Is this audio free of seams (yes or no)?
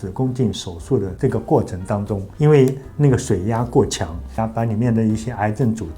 no